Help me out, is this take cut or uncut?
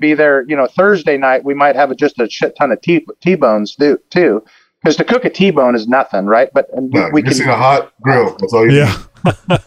uncut